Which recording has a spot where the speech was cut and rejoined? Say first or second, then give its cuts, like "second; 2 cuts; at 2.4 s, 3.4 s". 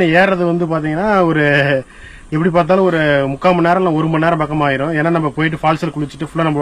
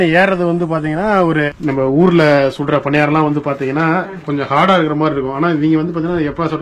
second; 1 cut; at 1.5 s